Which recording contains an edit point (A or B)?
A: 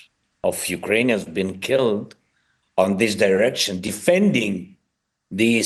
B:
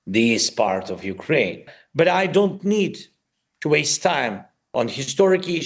B